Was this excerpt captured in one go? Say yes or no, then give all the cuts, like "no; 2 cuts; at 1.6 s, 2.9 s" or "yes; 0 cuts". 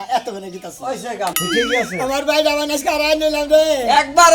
no; 1 cut; at 1.3 s